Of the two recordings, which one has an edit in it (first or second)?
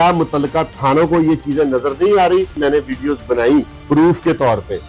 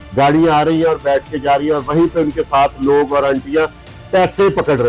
first